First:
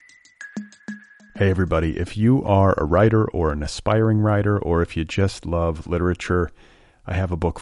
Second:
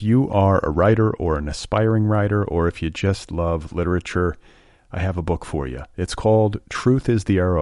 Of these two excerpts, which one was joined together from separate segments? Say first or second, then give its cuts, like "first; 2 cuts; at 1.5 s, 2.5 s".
first; 1 cut; at 0.9 s